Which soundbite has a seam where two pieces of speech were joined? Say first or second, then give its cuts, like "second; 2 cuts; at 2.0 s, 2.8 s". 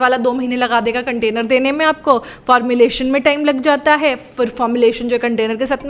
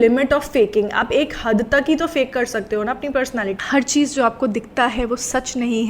second; 1 cut; at 3.6 s